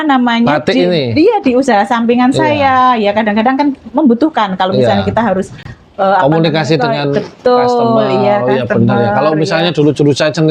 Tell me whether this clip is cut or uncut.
uncut